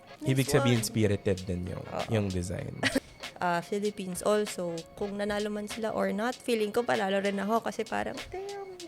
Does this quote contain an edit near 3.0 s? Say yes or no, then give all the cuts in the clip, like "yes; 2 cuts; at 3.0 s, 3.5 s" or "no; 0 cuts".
yes; 1 cut; at 3.0 s